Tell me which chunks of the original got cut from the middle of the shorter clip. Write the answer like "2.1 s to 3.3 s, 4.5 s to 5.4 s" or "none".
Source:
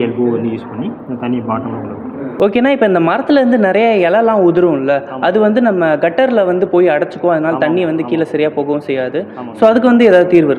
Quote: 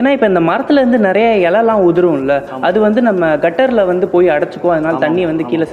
none